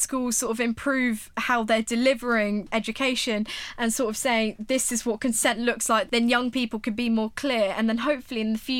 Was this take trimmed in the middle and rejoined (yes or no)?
yes